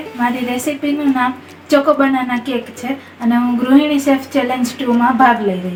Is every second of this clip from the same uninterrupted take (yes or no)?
yes